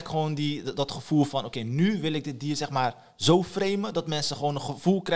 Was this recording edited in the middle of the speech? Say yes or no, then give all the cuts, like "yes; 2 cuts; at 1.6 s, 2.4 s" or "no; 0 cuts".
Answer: no; 0 cuts